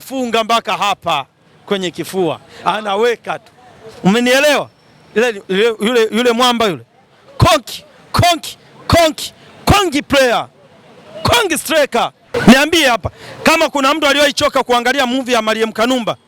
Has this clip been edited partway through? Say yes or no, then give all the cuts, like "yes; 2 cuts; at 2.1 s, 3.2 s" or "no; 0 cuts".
yes; 1 cut; at 12.3 s